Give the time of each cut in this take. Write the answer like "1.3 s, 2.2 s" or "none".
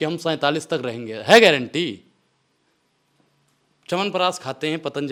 none